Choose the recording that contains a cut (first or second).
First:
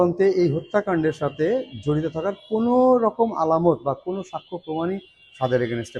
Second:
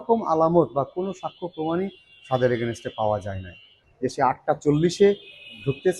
second